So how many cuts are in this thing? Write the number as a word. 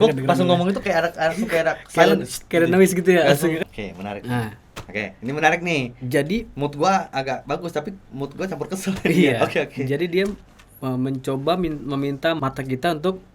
one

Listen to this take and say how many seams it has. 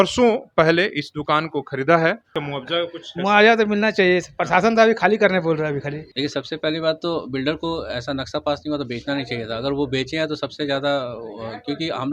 two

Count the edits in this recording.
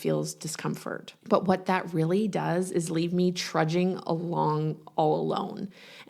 one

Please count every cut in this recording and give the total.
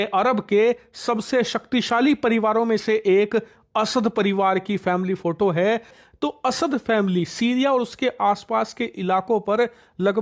zero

